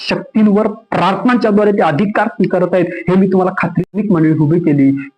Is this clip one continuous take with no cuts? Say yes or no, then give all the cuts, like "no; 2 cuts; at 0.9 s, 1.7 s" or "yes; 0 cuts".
no; 1 cut; at 3.9 s